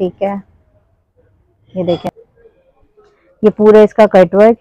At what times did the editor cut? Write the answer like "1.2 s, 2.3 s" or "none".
2.1 s